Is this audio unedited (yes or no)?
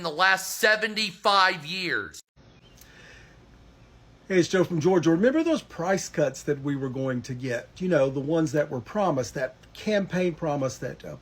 no